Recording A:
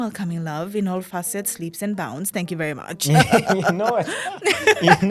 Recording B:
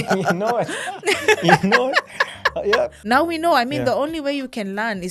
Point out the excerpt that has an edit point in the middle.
B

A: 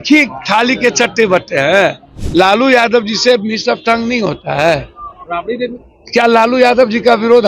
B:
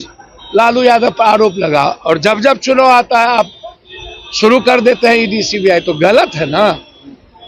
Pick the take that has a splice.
A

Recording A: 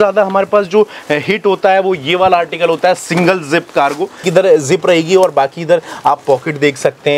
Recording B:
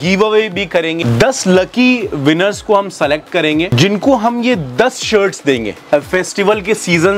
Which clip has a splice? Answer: B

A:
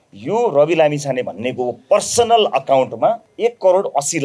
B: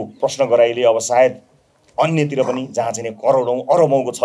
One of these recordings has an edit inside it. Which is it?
A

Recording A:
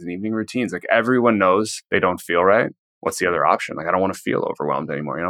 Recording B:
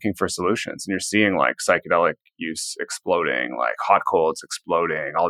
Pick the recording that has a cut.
A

